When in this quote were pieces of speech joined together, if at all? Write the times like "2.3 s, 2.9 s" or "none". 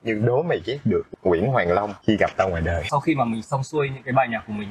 1.1 s, 1.9 s, 2.9 s